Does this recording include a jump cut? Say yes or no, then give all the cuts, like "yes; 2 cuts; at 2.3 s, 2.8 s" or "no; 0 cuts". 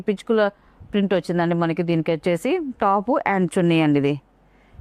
no; 0 cuts